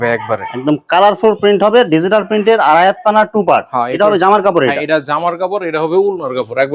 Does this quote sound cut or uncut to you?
uncut